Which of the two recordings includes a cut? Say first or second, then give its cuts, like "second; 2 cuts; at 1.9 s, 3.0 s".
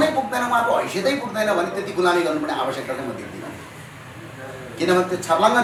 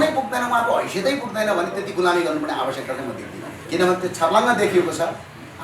second; 1 cut; at 3.5 s